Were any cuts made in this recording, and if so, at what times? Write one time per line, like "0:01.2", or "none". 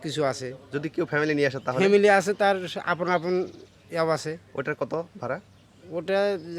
none